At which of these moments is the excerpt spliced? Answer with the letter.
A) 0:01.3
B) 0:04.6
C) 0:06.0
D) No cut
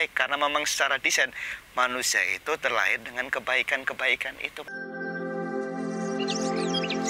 B